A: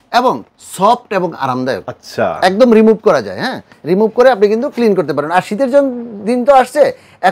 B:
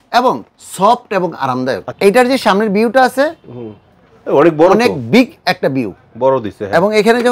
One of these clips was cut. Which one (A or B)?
B